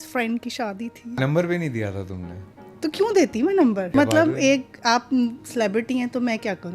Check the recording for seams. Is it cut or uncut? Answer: cut